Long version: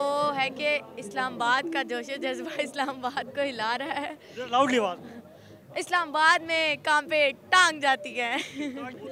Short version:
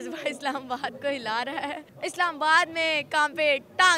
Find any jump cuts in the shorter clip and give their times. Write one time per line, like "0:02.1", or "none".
0:01.8